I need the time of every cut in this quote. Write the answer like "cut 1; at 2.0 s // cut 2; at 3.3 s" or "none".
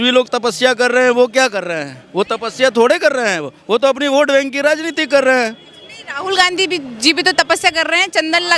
none

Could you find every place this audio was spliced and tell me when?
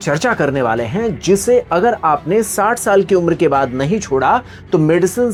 none

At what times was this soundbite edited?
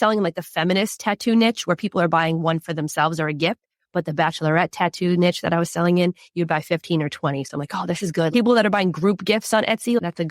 cut 1; at 8.3 s

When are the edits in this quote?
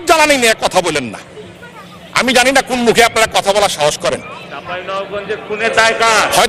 none

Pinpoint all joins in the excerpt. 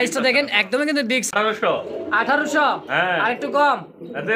cut 1; at 1.3 s

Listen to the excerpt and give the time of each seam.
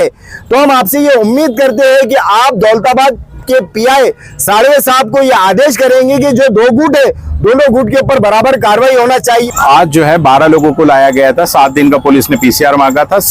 cut 1; at 9.5 s

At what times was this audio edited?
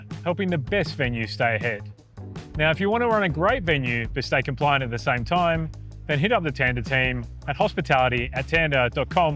none

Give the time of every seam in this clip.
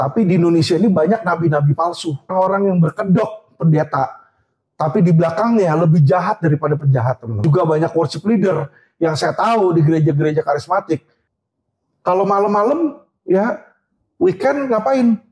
cut 1; at 2.3 s // cut 2; at 7.4 s // cut 3; at 11.2 s

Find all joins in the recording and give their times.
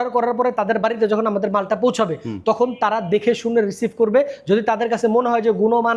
none

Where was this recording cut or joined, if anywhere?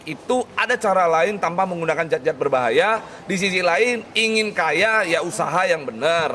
none

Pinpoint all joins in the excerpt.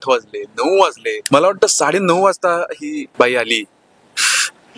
cut 1; at 1.2 s // cut 2; at 3.1 s

